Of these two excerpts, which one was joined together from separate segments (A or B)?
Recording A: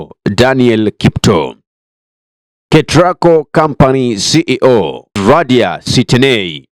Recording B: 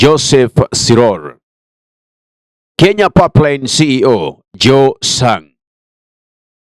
A